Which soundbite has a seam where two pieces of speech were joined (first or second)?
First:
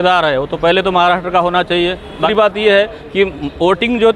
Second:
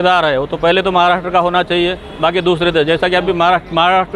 first